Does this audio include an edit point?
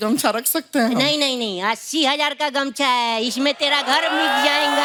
no; 0 cuts

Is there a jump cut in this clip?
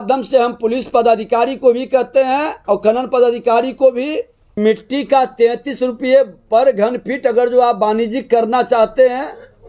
yes; 1 cut; at 4.6 s

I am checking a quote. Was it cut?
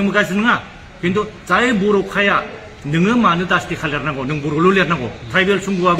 no; 0 cuts

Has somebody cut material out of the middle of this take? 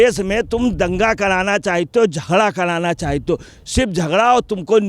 no; 0 cuts

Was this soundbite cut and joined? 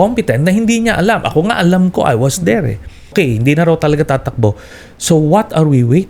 yes; 1 cut; at 3.1 s

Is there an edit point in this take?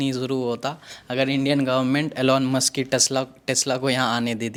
no; 0 cuts

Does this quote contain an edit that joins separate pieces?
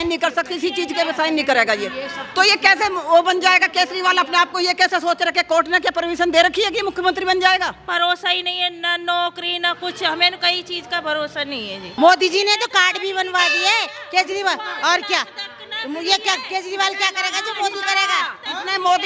yes; 2 cuts; at 7.8 s, 11.9 s

